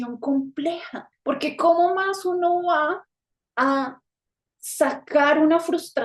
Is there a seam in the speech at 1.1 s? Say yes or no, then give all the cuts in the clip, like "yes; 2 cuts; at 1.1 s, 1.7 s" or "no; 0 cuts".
yes; 1 cut; at 1.1 s